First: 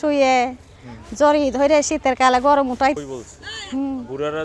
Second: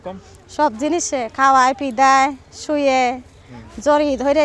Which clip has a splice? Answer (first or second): first